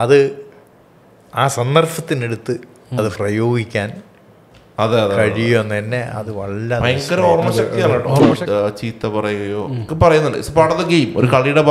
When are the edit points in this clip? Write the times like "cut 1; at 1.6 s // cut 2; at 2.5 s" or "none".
cut 1; at 8.4 s